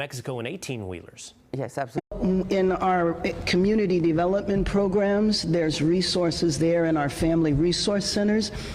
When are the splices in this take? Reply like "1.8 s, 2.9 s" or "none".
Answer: 2.0 s